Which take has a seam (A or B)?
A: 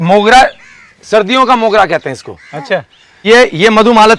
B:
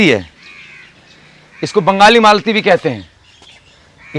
A